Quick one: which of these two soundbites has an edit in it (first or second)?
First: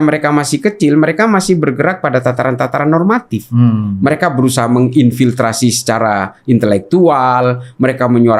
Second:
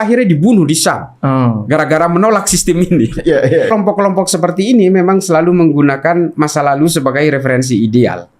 second